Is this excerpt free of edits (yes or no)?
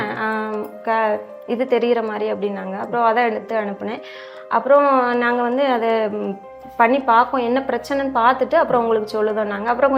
yes